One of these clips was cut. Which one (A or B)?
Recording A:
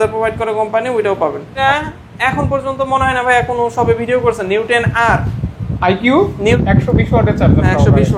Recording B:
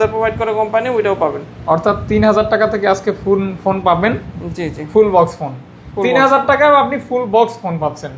A